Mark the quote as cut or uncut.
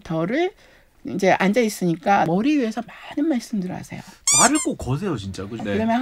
cut